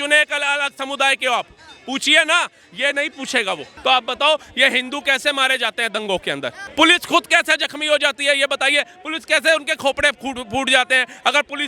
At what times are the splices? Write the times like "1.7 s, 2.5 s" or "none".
3.7 s, 6.6 s